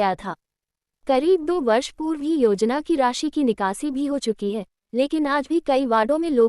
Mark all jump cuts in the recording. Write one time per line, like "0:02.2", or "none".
0:03.6